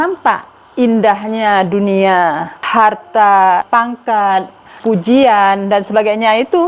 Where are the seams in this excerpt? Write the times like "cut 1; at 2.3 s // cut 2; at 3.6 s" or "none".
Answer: cut 1; at 2.5 s // cut 2; at 3.6 s // cut 3; at 4.7 s